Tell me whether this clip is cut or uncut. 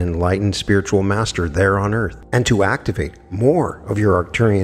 cut